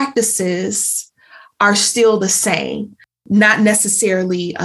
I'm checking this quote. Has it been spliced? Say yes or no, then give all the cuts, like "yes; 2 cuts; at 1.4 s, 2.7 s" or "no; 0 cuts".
yes; 1 cut; at 3.2 s